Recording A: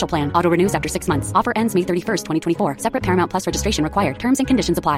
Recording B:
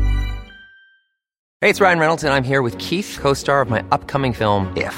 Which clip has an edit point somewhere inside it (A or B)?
B